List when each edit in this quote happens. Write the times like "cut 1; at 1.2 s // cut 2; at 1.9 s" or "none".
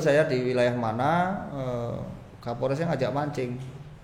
none